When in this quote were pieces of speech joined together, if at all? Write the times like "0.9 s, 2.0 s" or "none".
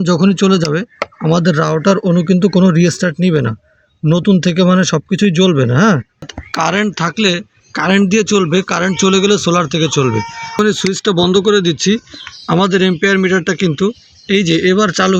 6.3 s, 10.6 s